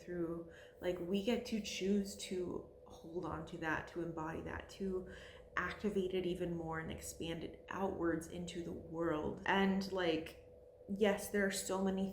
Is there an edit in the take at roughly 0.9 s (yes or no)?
no